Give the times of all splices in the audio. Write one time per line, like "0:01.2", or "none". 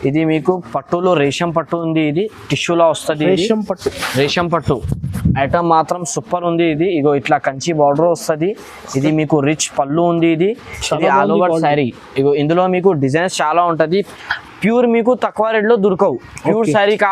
0:14.3

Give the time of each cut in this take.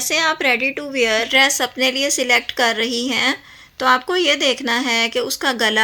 none

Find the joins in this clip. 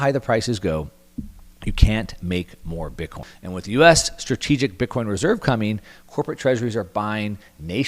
0:03.3

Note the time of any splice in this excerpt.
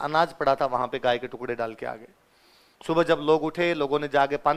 none

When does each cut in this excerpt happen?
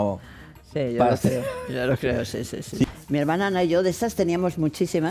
0:02.8

